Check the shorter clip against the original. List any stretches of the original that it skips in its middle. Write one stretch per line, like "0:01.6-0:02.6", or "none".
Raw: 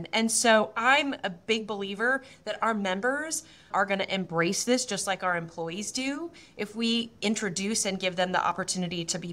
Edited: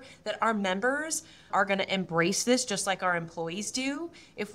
none